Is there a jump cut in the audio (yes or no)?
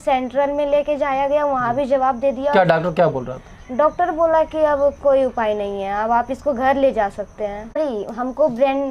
yes